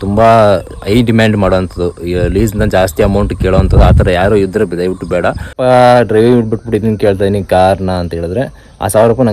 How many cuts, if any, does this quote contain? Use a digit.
1